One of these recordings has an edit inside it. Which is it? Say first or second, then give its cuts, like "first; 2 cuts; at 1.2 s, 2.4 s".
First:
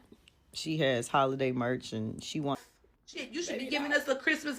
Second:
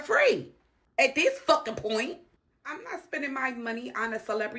first; 1 cut; at 2.6 s